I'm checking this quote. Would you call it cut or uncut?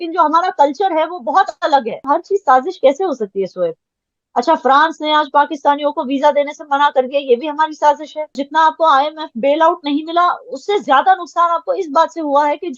cut